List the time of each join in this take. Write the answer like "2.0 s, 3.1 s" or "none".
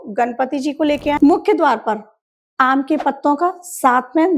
1.2 s